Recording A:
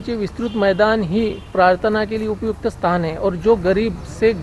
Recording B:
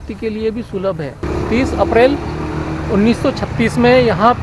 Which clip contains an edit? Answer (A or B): B